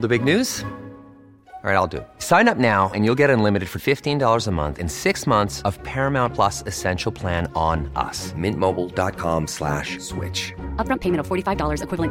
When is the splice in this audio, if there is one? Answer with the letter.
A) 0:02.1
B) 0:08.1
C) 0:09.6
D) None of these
D